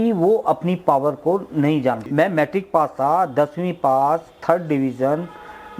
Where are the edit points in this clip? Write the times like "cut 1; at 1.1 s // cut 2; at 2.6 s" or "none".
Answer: cut 1; at 2.0 s